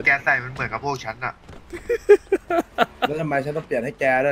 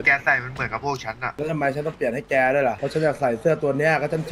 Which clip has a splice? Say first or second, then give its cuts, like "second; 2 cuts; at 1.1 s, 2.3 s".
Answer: second; 2 cuts; at 1.4 s, 2.8 s